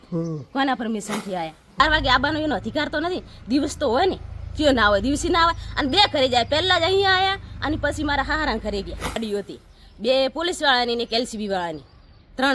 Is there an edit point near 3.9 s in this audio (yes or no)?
no